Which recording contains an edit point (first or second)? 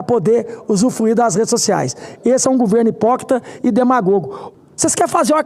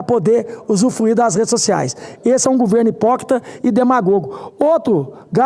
first